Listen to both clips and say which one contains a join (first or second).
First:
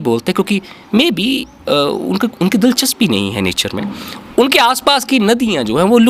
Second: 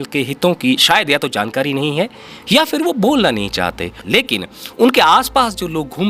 second